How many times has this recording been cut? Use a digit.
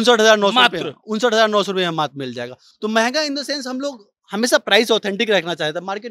0